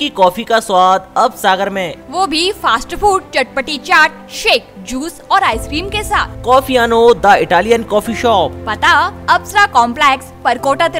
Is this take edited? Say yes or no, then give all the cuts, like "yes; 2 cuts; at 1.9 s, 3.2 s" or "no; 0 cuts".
no; 0 cuts